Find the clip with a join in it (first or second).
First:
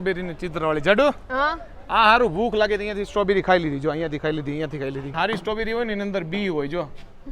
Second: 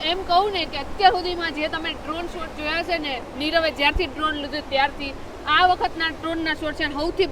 first